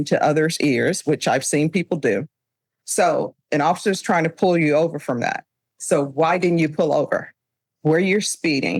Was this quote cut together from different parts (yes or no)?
yes